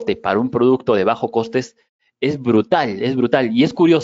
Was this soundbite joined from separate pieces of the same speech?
no; 0 cuts

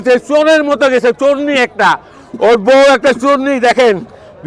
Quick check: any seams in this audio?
no; 0 cuts

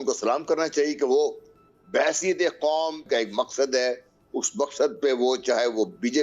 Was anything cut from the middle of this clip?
yes; 1 cut; at 3.0 s

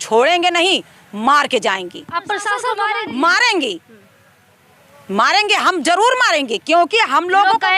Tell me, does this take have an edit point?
yes; 1 cut; at 2.7 s

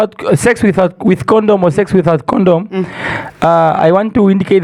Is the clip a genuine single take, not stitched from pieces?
yes; 0 cuts

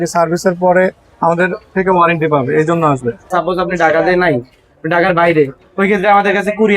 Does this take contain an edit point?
yes; 1 cut; at 3.3 s

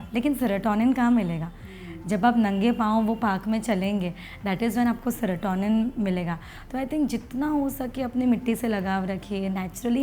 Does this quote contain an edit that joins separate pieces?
no; 0 cuts

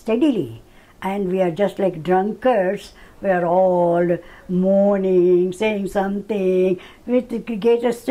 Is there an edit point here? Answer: no; 0 cuts

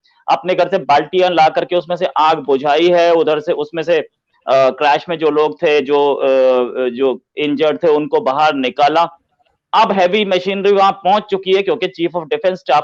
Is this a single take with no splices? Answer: yes; 0 cuts

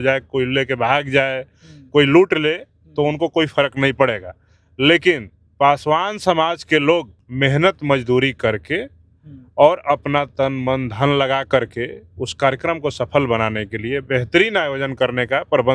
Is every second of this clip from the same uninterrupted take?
no; 1 cut; at 7.2 s

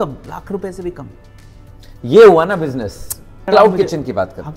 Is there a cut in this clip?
yes; 1 cut; at 3.3 s

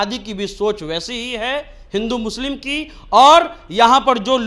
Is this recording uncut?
yes; 0 cuts

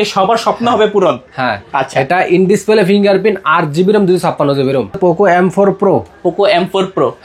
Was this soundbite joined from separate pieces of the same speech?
yes; 1 cut; at 5.0 s

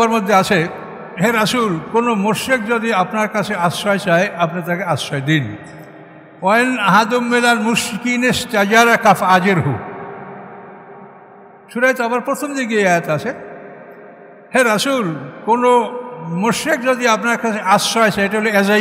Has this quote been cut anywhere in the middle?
yes; 1 cut; at 1.2 s

